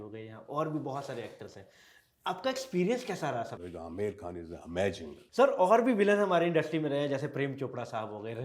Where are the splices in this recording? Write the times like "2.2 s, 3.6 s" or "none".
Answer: 3.6 s, 5.1 s